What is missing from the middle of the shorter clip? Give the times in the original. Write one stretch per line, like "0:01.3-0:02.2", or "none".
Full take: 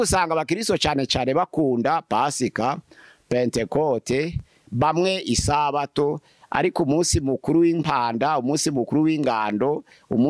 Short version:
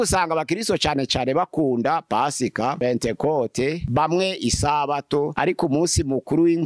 0:02.8-0:03.3
0:04.3-0:04.7
0:06.2-0:06.5